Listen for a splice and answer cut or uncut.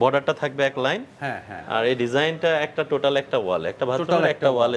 uncut